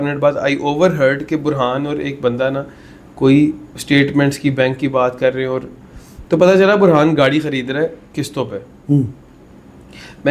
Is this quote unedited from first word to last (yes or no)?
yes